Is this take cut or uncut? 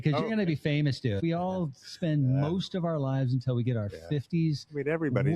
cut